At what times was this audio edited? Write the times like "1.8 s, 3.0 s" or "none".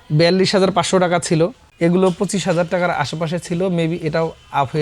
1.6 s